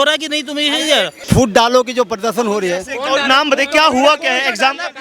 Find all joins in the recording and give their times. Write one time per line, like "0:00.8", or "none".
0:01.1